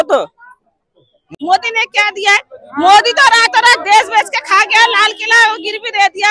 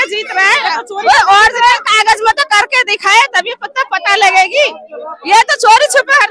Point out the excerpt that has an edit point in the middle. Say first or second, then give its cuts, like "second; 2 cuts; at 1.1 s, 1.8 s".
first; 1 cut; at 1.3 s